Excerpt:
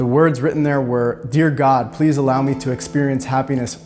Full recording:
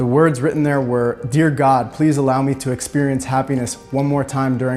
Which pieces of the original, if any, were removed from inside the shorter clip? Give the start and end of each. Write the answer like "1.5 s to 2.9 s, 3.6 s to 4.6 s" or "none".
none